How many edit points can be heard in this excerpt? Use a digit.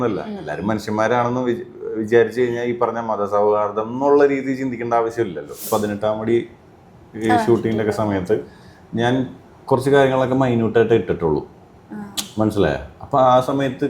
1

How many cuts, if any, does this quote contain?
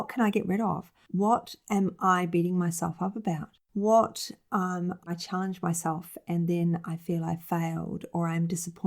1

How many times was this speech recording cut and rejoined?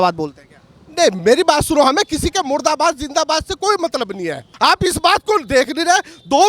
1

